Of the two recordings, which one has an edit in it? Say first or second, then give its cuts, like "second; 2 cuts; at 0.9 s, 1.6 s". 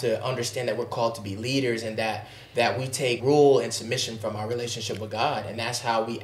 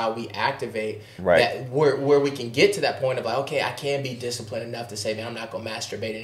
first; 1 cut; at 3.2 s